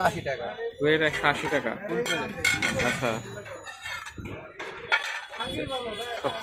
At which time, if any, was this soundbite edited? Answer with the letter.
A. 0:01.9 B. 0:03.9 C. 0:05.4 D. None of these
D